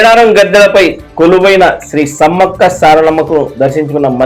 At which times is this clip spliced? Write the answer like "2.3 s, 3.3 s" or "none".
none